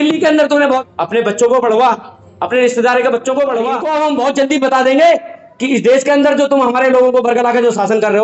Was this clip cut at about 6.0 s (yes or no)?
no